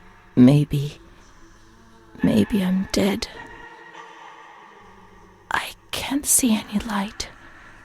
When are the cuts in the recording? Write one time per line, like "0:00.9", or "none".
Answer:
0:03.4
0:05.3